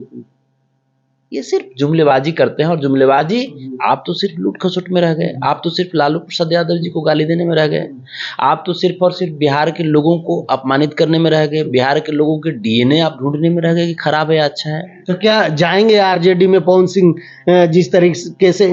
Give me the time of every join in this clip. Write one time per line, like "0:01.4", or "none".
0:03.6
0:14.9